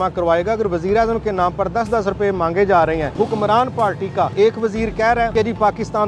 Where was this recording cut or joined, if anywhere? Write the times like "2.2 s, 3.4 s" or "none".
3.1 s, 4.3 s, 5.3 s